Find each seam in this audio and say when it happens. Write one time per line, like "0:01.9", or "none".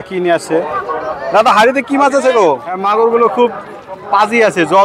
0:02.8